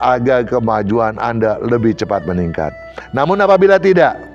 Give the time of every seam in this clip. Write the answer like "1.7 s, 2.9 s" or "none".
none